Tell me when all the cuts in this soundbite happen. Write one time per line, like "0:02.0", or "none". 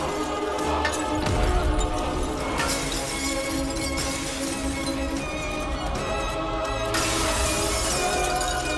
0:02.4
0:05.6
0:06.7

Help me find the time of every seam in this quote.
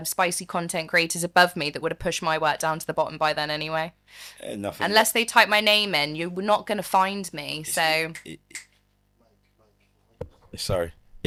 none

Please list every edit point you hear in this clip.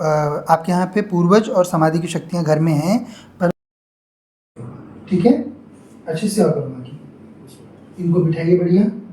none

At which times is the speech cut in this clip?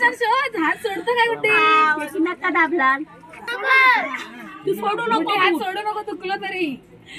0:03.5

